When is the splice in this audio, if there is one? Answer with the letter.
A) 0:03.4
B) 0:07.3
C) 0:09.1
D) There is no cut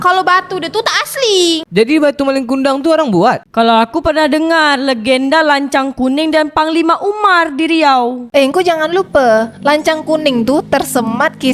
A